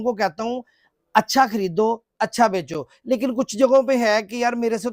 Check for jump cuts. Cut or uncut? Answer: uncut